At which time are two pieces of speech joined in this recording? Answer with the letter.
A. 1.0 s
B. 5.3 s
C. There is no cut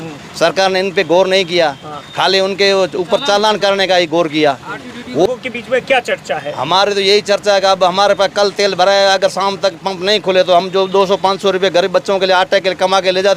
B